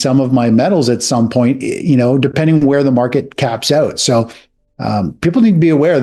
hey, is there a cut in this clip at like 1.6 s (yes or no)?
no